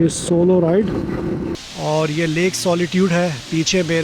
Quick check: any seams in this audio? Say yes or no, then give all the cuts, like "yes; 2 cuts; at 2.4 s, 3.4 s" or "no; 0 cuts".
yes; 1 cut; at 1.5 s